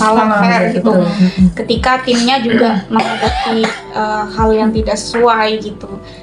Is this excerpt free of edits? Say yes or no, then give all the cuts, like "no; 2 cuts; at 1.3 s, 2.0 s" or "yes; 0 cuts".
yes; 0 cuts